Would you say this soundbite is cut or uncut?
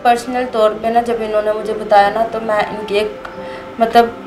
uncut